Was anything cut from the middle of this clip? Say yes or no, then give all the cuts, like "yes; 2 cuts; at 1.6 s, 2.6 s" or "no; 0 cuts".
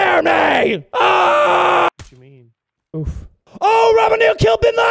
yes; 1 cut; at 1.9 s